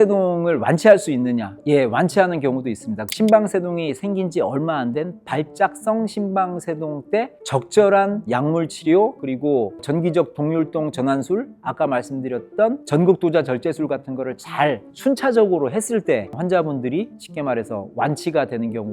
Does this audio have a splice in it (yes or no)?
yes